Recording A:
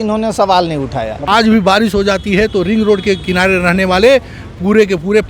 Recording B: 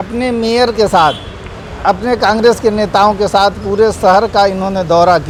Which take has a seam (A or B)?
A